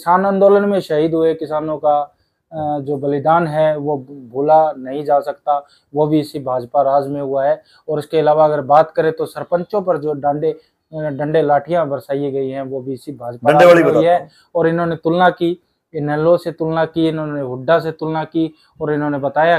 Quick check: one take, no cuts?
yes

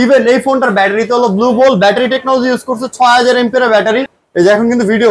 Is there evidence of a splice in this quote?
yes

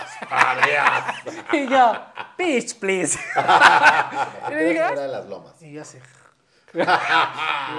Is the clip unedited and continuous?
no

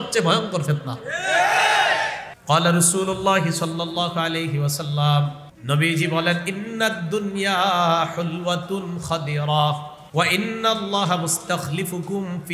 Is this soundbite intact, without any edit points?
no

